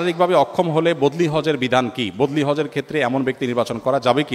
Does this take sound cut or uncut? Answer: uncut